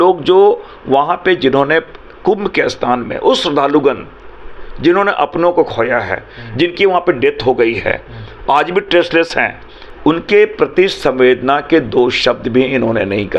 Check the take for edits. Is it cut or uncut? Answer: uncut